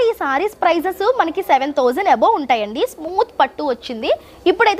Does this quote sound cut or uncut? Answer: uncut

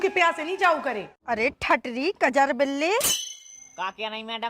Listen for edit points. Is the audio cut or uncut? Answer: cut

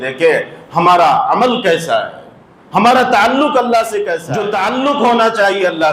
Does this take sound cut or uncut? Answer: cut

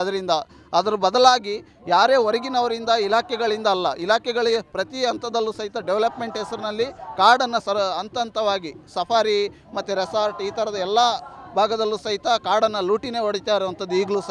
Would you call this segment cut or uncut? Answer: uncut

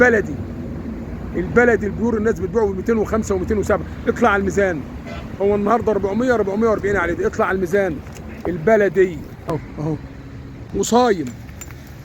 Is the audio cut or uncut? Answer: cut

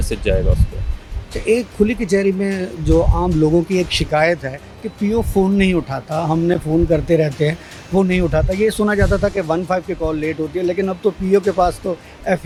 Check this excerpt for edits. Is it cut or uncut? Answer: uncut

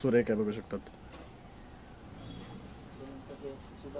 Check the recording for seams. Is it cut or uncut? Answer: uncut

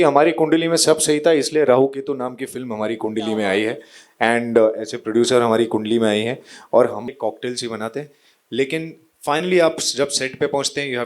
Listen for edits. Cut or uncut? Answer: cut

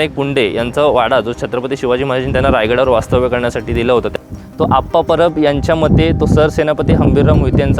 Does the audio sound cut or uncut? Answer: cut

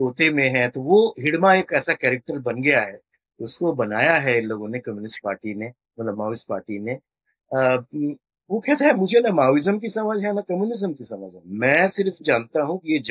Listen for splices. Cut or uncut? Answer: uncut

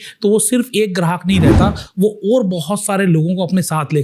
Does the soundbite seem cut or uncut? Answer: uncut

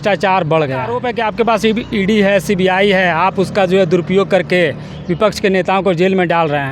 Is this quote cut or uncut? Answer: cut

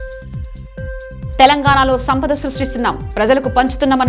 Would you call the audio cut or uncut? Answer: uncut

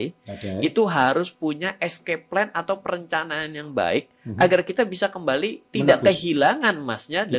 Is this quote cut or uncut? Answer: uncut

